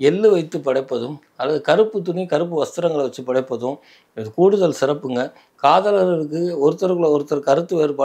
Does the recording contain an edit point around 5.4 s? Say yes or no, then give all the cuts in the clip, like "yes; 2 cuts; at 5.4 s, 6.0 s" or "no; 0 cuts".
yes; 1 cut; at 5.4 s